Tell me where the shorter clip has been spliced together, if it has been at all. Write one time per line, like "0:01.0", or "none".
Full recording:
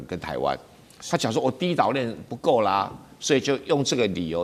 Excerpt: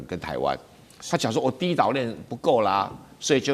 none